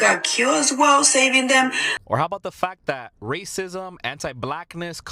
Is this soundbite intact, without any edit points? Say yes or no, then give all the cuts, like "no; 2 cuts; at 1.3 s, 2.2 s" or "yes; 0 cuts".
no; 1 cut; at 2.0 s